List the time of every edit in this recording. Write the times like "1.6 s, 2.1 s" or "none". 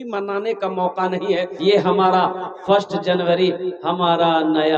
1.5 s